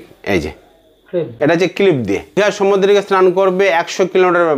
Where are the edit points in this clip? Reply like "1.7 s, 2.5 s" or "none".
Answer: 1.3 s, 2.4 s